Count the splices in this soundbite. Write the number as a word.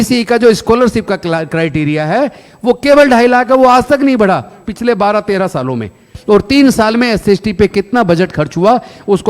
one